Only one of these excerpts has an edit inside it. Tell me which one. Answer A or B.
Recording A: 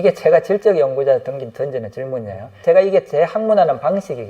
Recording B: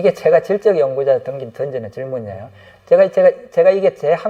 A